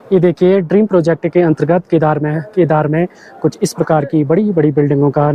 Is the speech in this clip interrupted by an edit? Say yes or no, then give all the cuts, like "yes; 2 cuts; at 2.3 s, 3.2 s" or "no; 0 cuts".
no; 0 cuts